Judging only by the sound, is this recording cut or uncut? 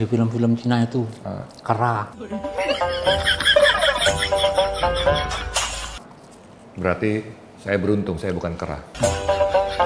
uncut